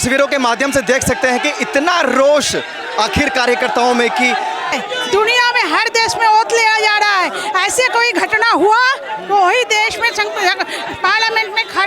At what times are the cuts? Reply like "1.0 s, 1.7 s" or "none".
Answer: 4.8 s